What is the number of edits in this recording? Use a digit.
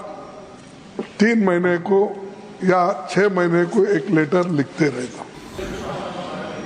1